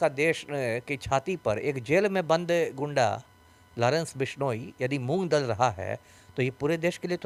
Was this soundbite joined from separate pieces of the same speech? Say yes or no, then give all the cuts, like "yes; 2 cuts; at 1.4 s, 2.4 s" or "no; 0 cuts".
no; 0 cuts